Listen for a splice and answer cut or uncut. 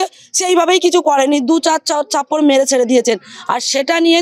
uncut